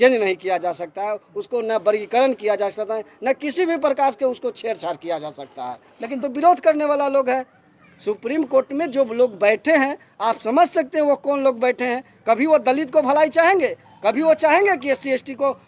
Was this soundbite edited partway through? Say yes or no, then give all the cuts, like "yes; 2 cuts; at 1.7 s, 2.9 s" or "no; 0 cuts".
yes; 1 cut; at 6.2 s